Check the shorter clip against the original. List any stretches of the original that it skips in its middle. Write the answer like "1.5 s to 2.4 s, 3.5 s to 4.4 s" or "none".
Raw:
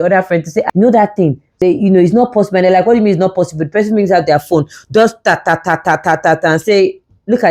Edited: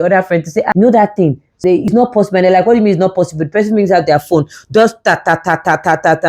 1.9 s to 2.1 s